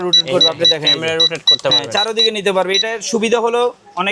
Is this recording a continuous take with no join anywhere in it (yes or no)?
yes